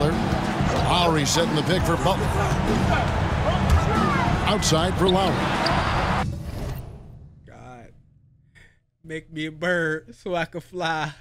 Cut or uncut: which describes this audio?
uncut